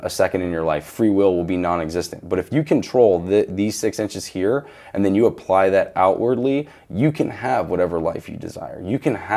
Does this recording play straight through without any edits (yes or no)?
yes